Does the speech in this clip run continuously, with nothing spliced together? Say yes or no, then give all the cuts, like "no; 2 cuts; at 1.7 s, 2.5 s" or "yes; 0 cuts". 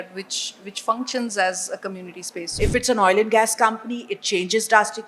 no; 1 cut; at 2.6 s